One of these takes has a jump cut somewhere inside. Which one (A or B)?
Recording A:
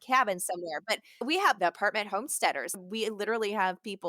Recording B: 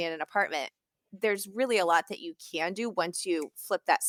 A